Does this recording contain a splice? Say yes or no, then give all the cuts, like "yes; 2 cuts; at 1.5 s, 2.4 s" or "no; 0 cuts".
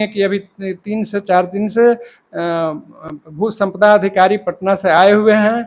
no; 0 cuts